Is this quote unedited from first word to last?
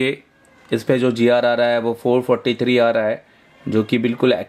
yes; 0 cuts

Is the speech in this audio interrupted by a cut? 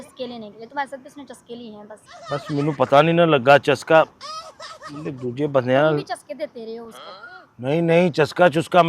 yes; 1 cut; at 2.1 s

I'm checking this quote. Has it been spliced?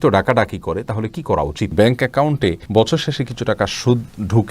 yes; 1 cut; at 1.7 s

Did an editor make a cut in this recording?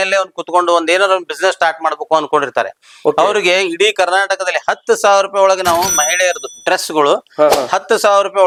no; 0 cuts

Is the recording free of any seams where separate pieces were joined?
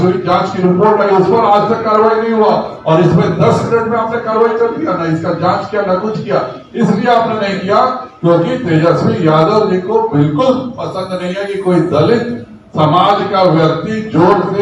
yes; 0 cuts

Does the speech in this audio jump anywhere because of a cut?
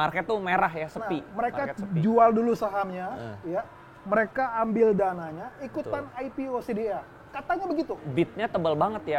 yes; 1 cut; at 8.0 s

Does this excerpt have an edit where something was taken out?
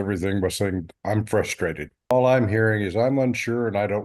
yes; 1 cut; at 2.1 s

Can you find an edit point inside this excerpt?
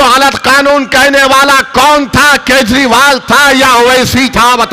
no; 0 cuts

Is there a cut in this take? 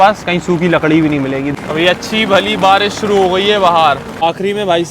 yes; 2 cuts; at 1.4 s, 4.2 s

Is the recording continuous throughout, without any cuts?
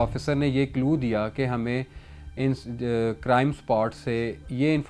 yes; 0 cuts

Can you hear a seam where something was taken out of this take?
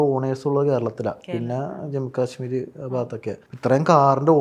no; 0 cuts

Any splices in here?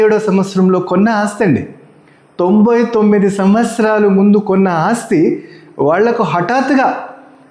no; 0 cuts

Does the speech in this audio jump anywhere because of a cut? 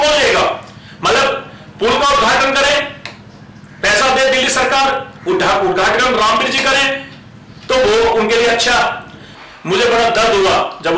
yes; 1 cut; at 9.3 s

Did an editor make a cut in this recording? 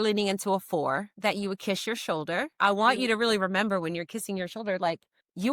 yes; 2 cuts; at 1.1 s, 2.6 s

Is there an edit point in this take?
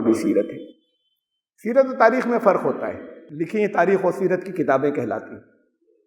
yes; 1 cut; at 3.3 s

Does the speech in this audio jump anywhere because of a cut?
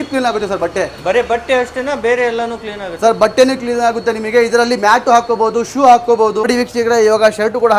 no; 0 cuts

